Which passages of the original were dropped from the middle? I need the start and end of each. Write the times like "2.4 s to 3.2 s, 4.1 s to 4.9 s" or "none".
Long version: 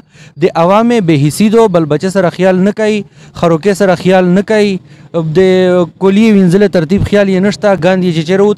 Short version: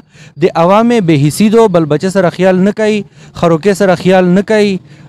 none